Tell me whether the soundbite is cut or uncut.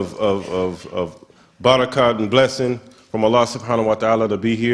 cut